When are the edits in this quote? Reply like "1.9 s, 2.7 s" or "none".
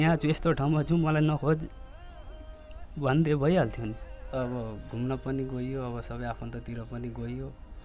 4.3 s

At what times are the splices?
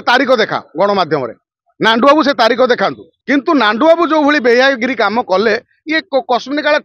3.1 s

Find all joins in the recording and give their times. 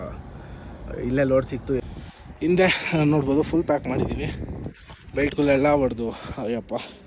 1.8 s

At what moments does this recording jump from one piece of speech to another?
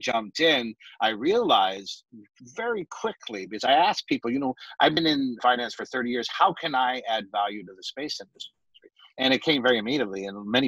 5.4 s

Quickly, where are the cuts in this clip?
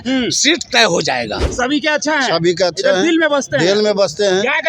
1.4 s

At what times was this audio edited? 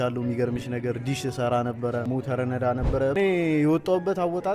2.0 s, 3.1 s

